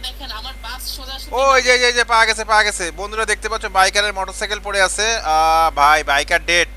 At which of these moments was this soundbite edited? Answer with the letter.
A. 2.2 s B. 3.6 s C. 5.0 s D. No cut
D